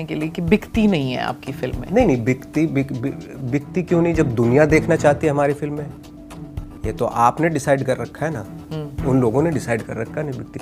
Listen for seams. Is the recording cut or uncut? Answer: uncut